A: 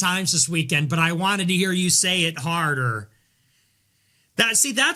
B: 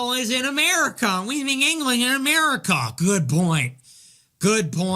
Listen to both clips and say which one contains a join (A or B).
B